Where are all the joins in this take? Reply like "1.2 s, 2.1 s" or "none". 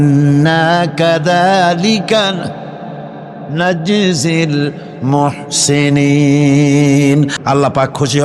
7.3 s